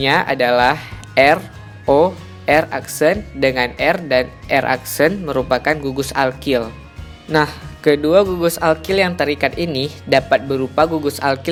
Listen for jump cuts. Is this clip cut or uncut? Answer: uncut